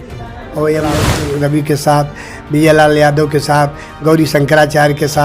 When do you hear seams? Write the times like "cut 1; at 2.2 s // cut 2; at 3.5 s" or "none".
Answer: cut 1; at 1.0 s

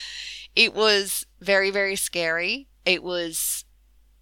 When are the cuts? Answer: cut 1; at 2.7 s

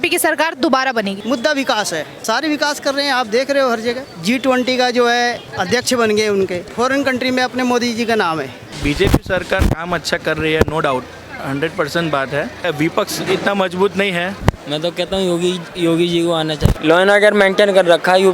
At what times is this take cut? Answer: cut 1; at 1.2 s // cut 2; at 2.1 s // cut 3; at 4.1 s // cut 4; at 5.5 s // cut 5; at 6.6 s // cut 6; at 8.7 s // cut 7; at 12.7 s // cut 8; at 14.3 s // cut 9; at 16.7 s

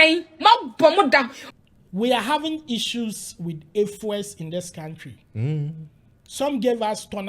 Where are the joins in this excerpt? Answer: cut 1; at 1.4 s

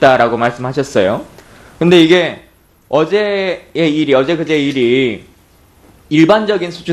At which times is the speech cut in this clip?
cut 1; at 2.8 s

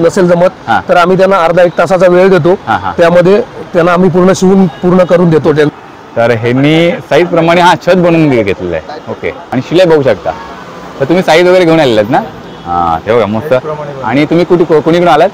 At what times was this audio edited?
cut 1; at 5.7 s // cut 2; at 9.4 s

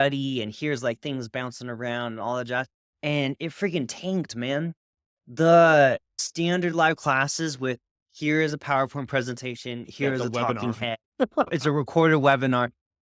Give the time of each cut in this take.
cut 1; at 6.2 s // cut 2; at 11.5 s

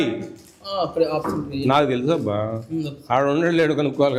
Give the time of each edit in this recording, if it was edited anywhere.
none

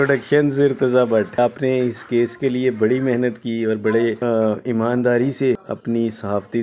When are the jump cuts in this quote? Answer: cut 1; at 1.4 s // cut 2; at 4.2 s // cut 3; at 5.7 s

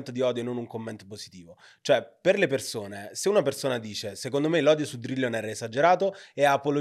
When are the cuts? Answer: none

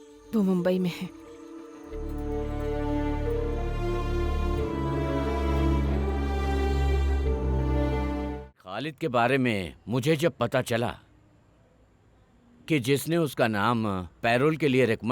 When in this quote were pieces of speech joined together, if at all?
cut 1; at 8.6 s

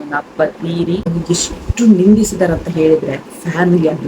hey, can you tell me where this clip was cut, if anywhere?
cut 1; at 1.1 s

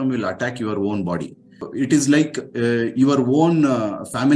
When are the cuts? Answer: cut 1; at 1.6 s

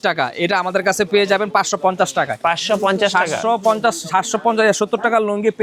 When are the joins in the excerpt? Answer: none

